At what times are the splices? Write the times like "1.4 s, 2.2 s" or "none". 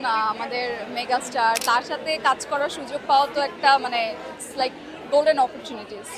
1.6 s

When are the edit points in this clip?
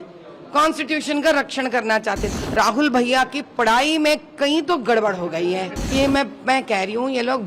2.3 s, 5.9 s

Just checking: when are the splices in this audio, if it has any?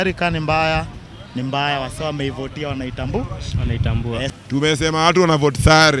4.3 s

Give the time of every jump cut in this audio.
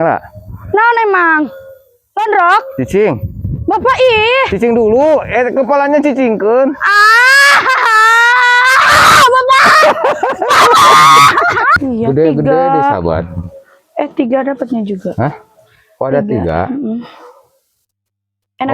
11.8 s

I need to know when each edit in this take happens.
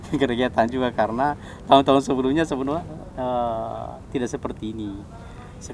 none

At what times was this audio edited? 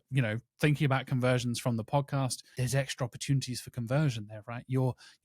2.5 s

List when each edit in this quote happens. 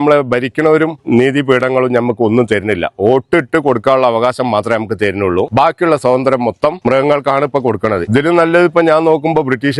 1.0 s, 5.5 s, 6.8 s, 8.0 s

